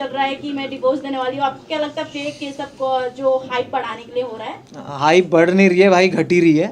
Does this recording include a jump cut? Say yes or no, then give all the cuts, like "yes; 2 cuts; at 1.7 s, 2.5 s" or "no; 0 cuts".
no; 0 cuts